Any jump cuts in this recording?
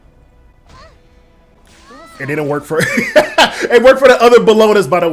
no; 0 cuts

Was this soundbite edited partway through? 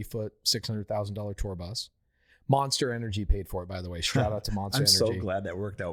no; 0 cuts

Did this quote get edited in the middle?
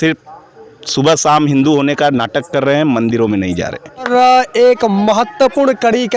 yes; 1 cut; at 4.1 s

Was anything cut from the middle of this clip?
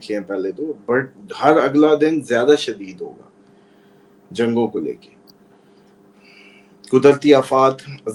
no; 0 cuts

